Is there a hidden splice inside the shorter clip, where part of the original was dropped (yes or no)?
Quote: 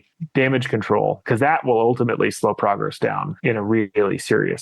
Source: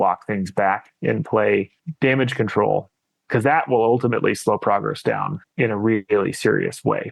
yes